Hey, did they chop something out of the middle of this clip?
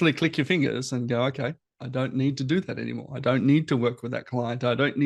no; 0 cuts

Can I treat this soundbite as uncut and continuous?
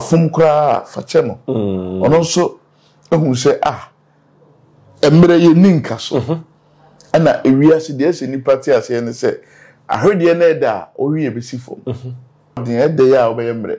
no; 1 cut; at 12.6 s

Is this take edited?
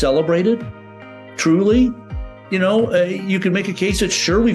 no; 0 cuts

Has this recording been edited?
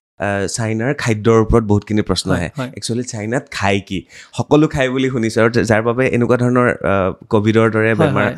no; 0 cuts

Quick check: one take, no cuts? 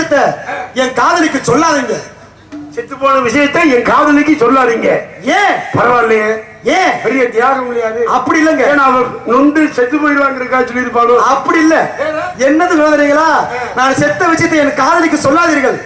yes; 0 cuts

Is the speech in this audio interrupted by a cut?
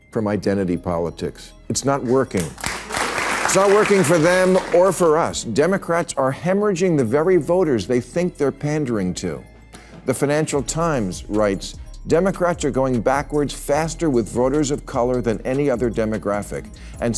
yes; 1 cut; at 3.0 s

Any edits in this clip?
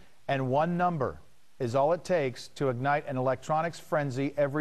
no; 0 cuts

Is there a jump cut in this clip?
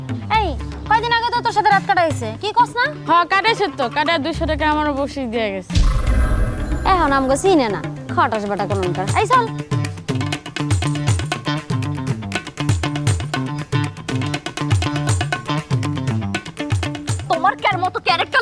yes; 2 cuts; at 9.5 s, 17.3 s

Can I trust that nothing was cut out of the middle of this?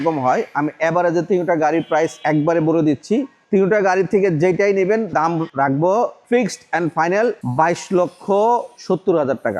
no; 6 cuts; at 2.2 s, 3.4 s, 5.1 s, 6.2 s, 7.4 s, 8.7 s

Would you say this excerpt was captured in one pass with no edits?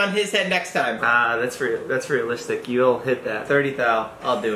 no; 1 cut; at 1.0 s

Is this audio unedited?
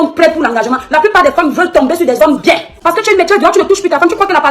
no; 1 cut; at 2.7 s

